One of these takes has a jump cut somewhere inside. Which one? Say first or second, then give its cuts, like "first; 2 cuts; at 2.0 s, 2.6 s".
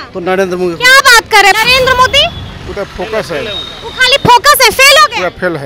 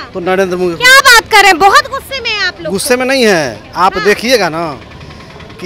first; 1 cut; at 1.6 s